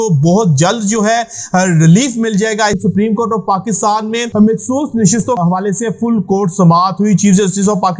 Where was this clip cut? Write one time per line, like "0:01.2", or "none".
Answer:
0:02.8
0:04.3
0:05.4